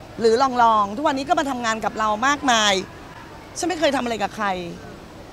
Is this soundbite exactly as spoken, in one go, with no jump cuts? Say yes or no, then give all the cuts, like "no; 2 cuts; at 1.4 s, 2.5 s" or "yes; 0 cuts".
yes; 0 cuts